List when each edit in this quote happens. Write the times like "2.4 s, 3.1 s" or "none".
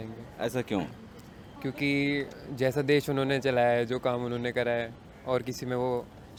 none